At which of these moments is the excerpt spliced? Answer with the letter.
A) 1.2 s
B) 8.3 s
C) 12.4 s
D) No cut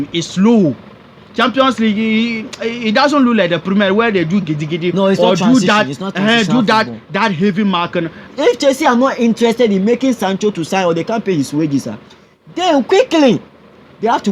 B